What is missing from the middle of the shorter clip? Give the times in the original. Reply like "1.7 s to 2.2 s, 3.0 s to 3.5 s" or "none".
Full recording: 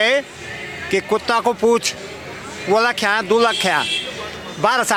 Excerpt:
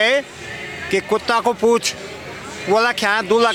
none